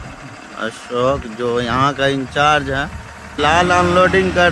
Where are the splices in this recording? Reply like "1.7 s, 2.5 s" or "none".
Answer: none